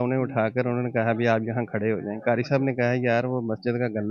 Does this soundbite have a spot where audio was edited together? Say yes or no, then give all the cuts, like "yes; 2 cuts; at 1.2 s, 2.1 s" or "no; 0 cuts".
no; 0 cuts